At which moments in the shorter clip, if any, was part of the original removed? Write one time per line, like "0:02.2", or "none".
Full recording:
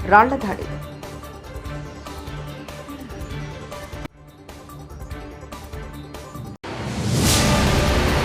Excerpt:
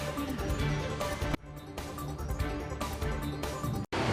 none